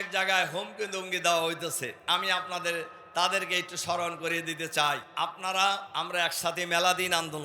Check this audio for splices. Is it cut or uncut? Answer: cut